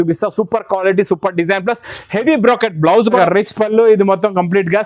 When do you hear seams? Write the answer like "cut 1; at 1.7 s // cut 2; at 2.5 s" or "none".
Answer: cut 1; at 3.2 s